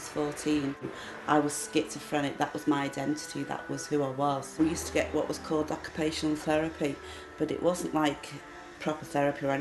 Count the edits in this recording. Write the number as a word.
two